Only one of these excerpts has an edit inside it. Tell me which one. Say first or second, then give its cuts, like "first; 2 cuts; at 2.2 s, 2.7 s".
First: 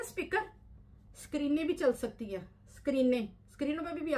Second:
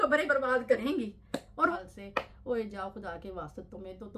second; 1 cut; at 1.7 s